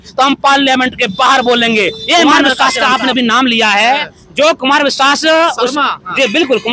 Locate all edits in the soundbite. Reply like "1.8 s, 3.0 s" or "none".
2.5 s